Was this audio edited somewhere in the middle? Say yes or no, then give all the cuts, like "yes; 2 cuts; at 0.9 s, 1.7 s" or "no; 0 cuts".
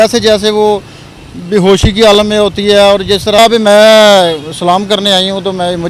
yes; 1 cut; at 3.4 s